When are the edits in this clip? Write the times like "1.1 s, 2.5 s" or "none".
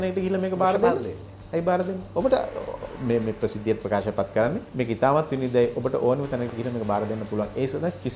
none